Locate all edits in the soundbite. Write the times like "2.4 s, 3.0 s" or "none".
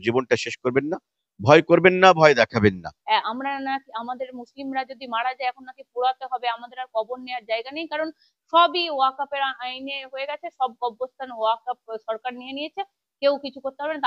2.9 s